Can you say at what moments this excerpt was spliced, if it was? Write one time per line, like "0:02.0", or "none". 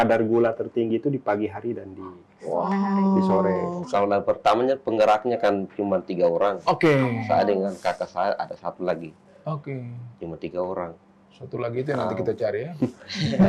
0:03.8